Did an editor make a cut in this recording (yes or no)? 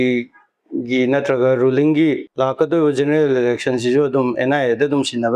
yes